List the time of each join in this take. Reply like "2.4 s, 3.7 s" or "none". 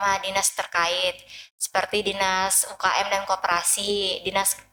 none